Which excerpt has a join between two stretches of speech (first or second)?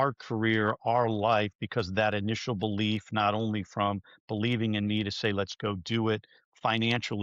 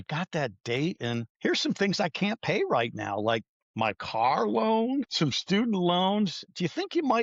second